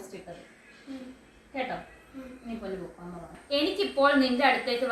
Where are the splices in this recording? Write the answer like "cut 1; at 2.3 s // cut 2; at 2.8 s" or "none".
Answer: cut 1; at 3.3 s